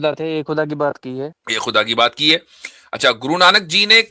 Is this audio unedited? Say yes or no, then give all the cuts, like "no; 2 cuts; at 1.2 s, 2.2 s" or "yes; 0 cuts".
no; 1 cut; at 1.4 s